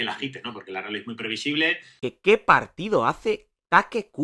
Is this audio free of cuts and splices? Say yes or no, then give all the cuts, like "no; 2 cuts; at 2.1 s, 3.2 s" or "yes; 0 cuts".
no; 1 cut; at 2.1 s